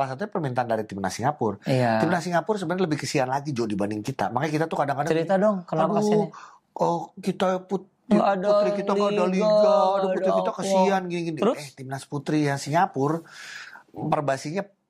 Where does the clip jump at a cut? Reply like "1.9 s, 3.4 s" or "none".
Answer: none